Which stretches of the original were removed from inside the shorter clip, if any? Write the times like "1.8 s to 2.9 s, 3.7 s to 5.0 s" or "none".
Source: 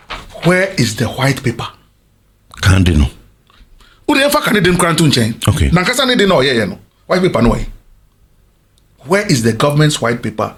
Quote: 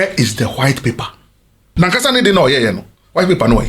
2.3 s to 5.6 s